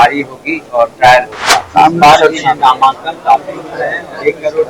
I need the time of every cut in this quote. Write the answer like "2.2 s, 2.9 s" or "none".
1.7 s